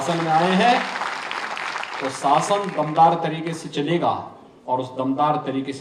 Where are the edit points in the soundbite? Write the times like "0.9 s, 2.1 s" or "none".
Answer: none